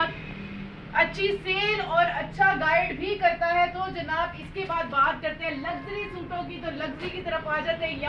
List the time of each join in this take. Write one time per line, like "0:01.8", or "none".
none